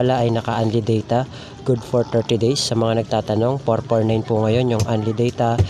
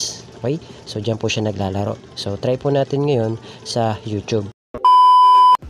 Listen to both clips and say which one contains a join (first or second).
second